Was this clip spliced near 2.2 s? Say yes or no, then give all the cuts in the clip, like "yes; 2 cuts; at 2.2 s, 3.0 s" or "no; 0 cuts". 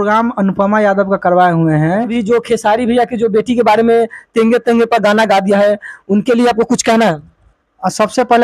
yes; 1 cut; at 2.2 s